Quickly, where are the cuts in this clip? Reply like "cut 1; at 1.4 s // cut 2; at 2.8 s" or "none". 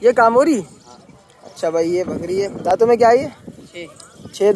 none